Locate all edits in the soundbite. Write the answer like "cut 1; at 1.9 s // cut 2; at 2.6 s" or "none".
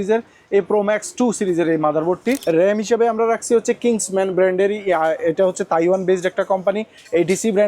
cut 1; at 2.4 s